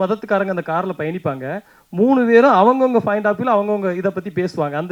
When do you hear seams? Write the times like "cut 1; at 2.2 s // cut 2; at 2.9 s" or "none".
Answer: none